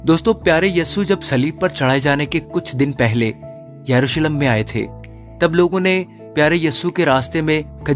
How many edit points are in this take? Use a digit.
0